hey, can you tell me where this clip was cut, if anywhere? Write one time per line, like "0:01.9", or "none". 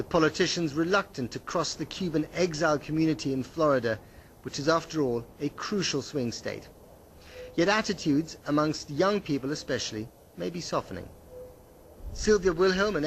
none